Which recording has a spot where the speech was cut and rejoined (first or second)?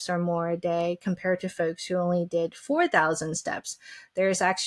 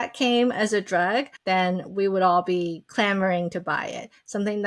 second